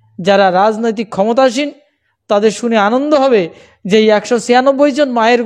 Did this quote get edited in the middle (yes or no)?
no